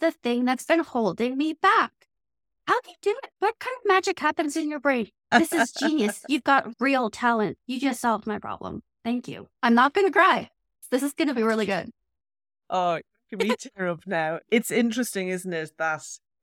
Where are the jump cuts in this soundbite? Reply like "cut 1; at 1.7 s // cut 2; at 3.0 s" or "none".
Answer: cut 1; at 9.4 s // cut 2; at 10.8 s